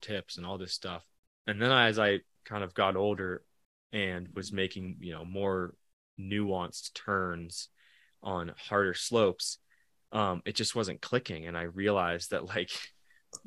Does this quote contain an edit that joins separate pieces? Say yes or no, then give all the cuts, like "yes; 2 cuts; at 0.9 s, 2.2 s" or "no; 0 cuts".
yes; 2 cuts; at 1.1 s, 2.4 s